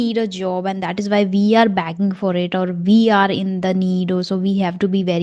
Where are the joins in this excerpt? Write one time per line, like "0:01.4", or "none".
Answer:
none